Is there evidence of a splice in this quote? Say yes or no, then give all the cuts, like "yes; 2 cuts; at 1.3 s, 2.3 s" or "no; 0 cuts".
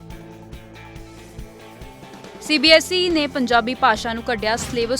yes; 1 cut; at 2.1 s